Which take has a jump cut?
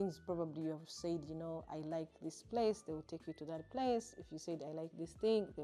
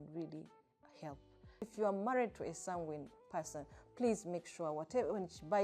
second; 1 cut; at 1.7 s

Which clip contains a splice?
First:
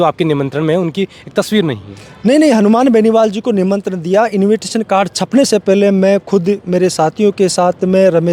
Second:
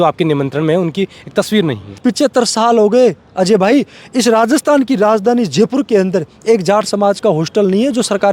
second; 1 cut; at 2.0 s

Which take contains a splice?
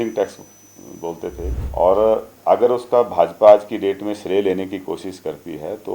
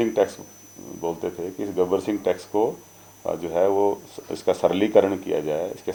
first; 1 cut; at 1.5 s

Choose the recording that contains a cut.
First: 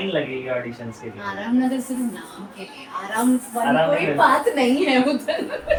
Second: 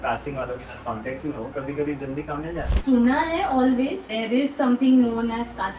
second; 3 cuts; at 1.5 s, 2.7 s, 4.1 s

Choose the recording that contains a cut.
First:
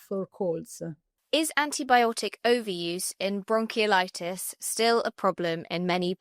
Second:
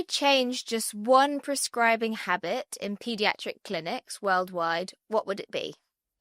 first; 1 cut; at 1.1 s

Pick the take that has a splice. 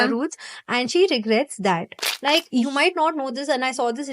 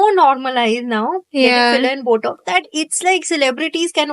first; 1 cut; at 2.1 s

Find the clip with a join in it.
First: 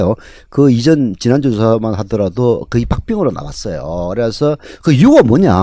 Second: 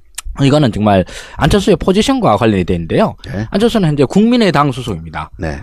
first; 1 cut; at 2.9 s

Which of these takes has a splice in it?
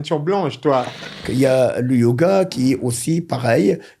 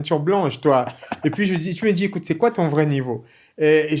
first; 1 cut; at 1.2 s

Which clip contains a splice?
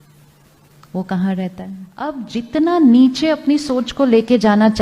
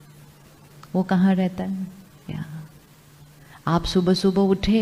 first; 1 cut; at 2.2 s

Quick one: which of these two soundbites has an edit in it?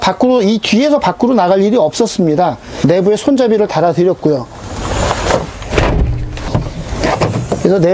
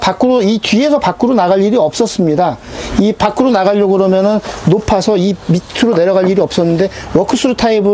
first; 2 cuts; at 2.7 s, 6.5 s

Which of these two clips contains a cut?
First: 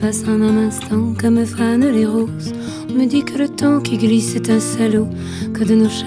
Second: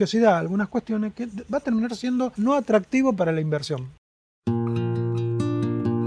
second; 2 cuts; at 2.3 s, 3.9 s

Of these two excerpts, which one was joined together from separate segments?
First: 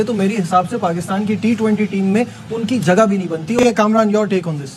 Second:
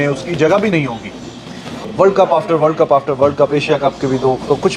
first; 1 cut; at 3.6 s

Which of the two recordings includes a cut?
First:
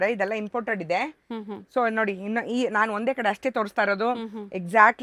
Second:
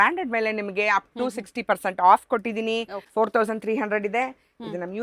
second; 1 cut; at 3.0 s

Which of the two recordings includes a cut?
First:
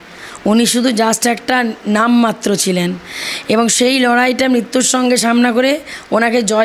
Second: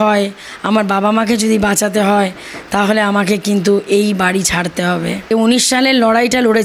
second; 1 cut; at 5.3 s

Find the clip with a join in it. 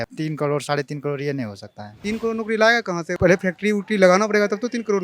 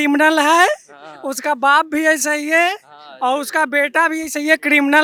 first; 1 cut; at 2.0 s

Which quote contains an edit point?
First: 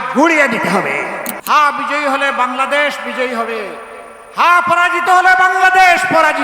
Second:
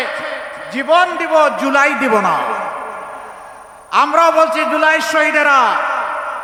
first; 1 cut; at 1.3 s

